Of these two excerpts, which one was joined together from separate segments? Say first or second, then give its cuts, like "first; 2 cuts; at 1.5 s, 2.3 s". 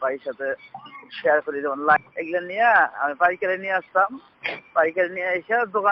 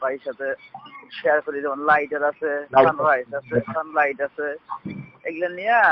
first; 1 cut; at 2.0 s